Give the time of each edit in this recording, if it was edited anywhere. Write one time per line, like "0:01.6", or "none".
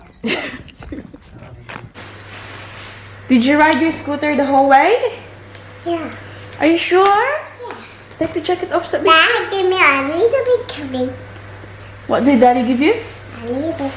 0:02.0